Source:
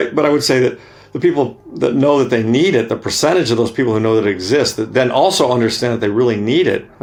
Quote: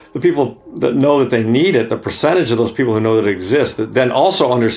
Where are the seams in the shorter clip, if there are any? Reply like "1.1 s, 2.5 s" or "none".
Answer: none